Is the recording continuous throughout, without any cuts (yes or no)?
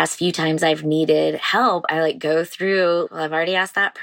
no